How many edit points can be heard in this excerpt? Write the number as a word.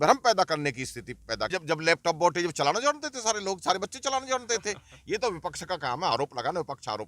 one